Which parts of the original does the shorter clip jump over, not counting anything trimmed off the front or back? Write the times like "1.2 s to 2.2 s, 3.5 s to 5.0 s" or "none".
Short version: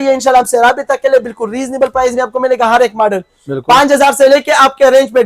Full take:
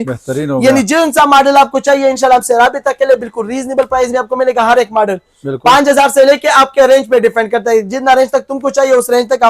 none

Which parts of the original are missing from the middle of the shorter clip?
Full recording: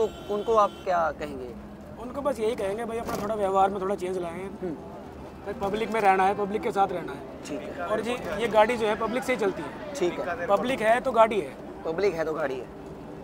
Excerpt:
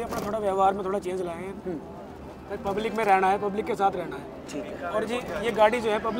none

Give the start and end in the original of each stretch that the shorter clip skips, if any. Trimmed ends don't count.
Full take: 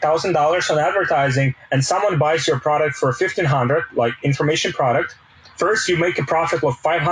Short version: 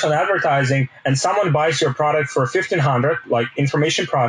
none

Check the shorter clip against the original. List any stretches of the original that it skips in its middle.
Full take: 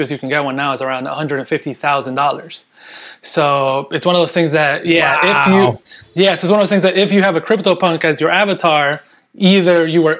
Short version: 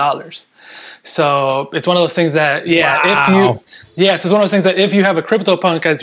none

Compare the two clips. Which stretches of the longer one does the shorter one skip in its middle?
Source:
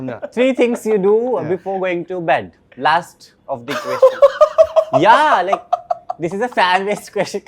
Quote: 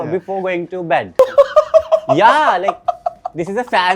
2.6 s to 4.0 s

